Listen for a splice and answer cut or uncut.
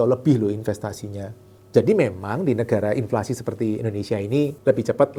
uncut